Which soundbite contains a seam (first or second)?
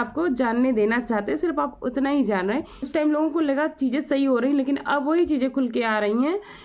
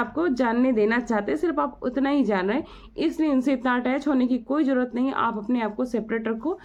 first